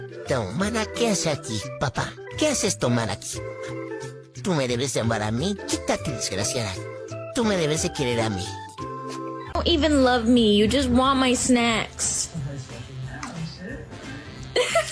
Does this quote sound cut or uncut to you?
cut